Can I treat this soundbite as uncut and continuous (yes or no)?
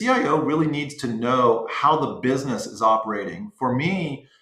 yes